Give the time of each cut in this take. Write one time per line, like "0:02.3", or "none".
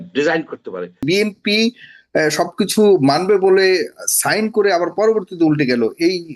0:01.0